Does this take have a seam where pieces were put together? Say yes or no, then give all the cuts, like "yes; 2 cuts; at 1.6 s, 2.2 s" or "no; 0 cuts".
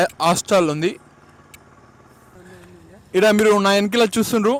no; 0 cuts